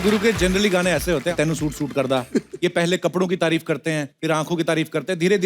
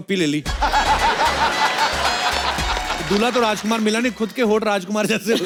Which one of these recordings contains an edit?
first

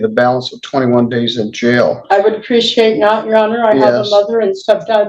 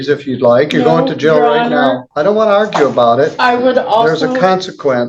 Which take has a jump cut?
second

